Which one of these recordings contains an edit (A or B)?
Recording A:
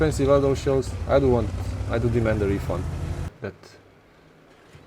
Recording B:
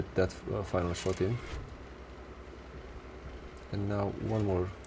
A